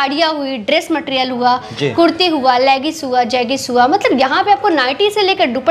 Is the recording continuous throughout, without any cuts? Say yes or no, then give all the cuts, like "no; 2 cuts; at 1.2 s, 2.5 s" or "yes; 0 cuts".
yes; 0 cuts